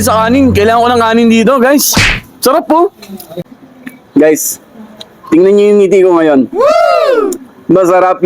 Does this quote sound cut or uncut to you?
cut